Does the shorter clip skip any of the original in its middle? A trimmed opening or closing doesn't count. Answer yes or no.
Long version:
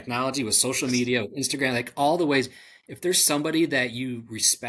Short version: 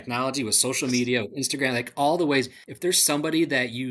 yes